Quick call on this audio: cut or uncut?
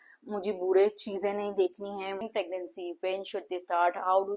cut